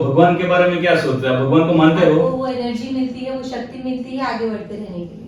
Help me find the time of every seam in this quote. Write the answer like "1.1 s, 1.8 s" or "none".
2.3 s